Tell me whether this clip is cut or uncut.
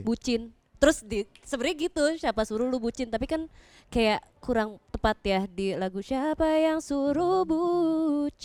uncut